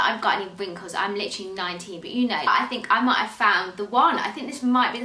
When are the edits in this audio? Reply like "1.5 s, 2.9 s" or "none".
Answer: 2.5 s